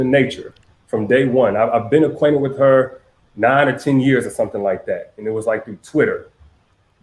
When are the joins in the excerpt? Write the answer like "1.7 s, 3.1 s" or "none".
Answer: 4.1 s